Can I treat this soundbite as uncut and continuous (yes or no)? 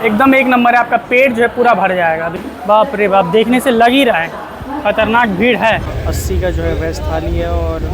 no